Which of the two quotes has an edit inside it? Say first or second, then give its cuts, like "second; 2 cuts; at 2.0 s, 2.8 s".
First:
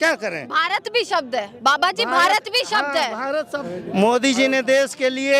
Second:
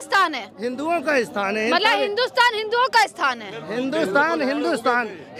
first; 1 cut; at 3.6 s